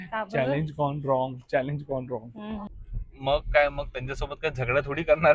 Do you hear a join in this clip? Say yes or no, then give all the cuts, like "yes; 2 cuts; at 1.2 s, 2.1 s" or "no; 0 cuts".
yes; 1 cut; at 3.2 s